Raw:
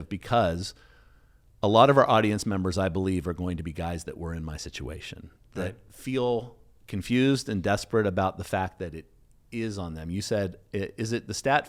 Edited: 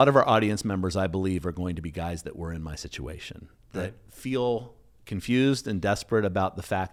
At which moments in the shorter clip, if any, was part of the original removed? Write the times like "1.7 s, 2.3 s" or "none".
none